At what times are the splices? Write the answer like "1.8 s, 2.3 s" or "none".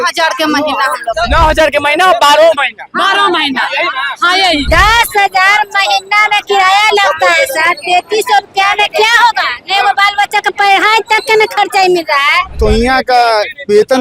4.7 s, 12.6 s